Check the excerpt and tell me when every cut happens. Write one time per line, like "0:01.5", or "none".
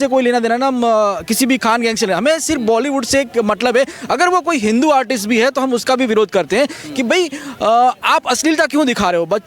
none